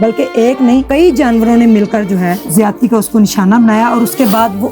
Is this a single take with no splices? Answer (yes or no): no